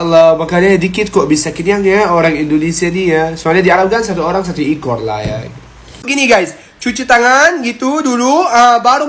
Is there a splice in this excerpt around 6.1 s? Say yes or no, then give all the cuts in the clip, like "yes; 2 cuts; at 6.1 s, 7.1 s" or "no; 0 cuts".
yes; 1 cut; at 6.1 s